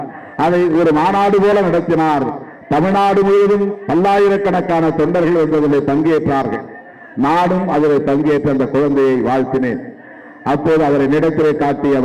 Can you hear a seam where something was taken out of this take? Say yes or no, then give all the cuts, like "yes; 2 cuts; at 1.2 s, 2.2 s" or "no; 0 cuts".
no; 0 cuts